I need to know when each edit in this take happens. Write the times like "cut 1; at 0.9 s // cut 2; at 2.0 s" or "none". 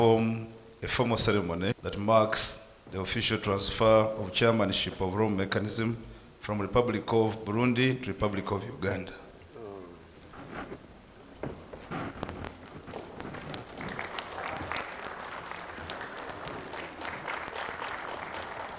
cut 1; at 1.8 s